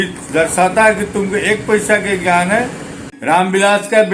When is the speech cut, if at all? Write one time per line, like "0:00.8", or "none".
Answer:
0:03.0